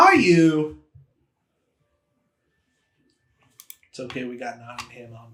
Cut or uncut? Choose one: uncut